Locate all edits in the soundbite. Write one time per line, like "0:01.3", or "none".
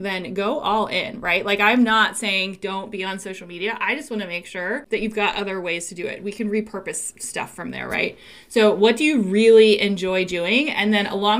0:04.8